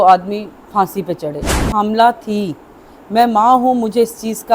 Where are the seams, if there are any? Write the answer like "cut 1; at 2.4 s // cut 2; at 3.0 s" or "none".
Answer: cut 1; at 1.7 s